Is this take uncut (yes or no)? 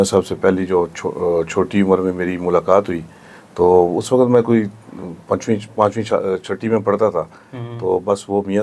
yes